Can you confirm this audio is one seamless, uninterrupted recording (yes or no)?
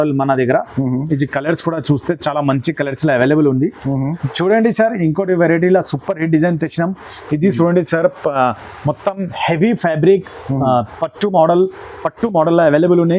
no